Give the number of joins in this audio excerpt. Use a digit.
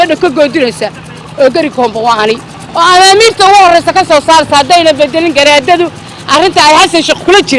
1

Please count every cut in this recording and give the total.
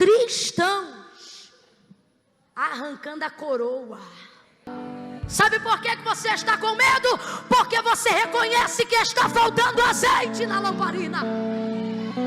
1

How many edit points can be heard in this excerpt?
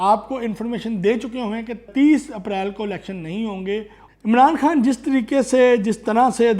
2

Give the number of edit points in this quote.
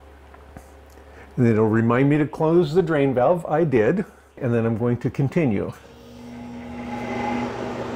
1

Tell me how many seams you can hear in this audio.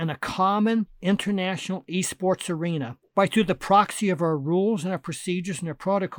2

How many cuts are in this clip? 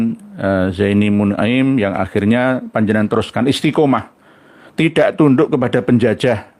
0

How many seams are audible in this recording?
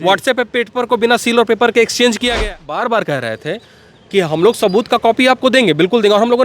1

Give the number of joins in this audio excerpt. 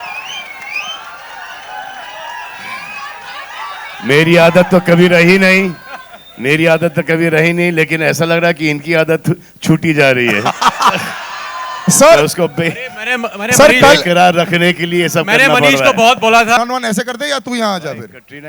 1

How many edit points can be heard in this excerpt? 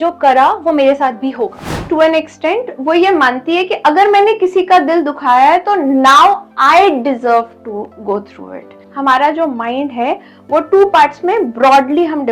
2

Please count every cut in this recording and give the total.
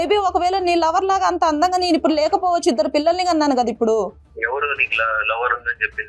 1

